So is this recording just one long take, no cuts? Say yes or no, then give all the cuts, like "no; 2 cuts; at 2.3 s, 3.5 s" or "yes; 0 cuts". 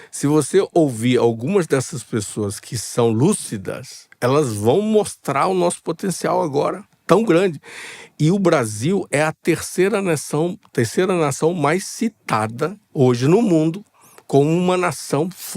yes; 0 cuts